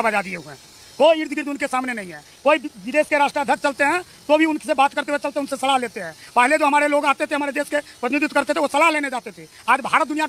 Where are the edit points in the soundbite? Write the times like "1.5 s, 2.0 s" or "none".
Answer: none